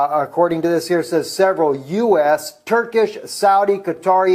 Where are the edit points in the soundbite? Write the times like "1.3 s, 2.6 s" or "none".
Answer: 2.9 s